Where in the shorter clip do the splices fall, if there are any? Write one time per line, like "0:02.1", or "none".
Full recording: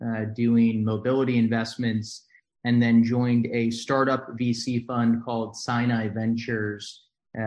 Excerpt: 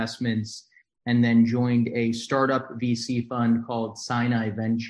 none